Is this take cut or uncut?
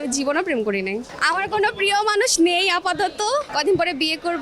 cut